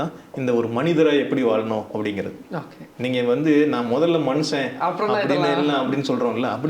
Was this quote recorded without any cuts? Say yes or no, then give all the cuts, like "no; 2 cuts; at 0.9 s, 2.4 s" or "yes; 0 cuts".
yes; 0 cuts